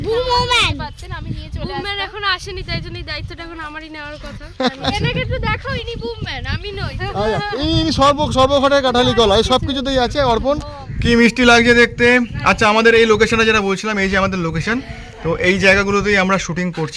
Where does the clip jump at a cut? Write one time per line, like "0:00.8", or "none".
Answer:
0:04.9
0:10.9